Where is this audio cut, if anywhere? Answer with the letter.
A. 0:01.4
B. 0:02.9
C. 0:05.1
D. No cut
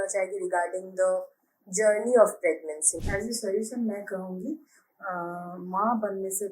B